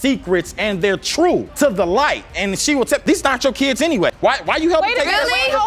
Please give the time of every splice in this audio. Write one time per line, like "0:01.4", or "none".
none